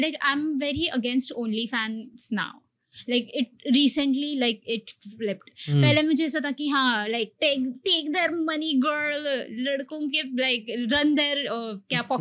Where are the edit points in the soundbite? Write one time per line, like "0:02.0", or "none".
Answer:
none